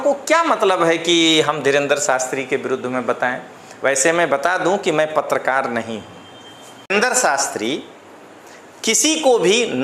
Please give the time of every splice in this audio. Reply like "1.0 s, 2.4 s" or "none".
6.9 s